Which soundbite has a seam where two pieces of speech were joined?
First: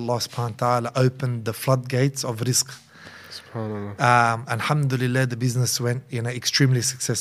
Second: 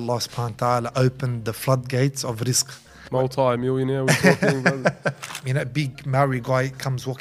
second; 2 cuts; at 3.0 s, 5.3 s

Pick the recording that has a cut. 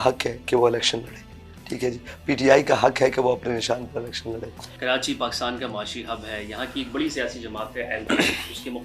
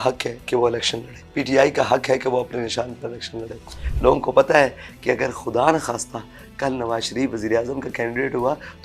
second; 2 cuts; at 1.2 s, 3.8 s

